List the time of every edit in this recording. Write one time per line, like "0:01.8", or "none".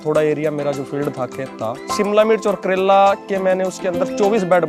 0:01.9